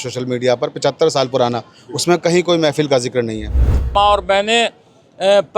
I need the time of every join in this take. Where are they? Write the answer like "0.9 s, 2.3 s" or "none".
3.9 s